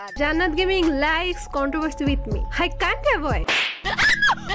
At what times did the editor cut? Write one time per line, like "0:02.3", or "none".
none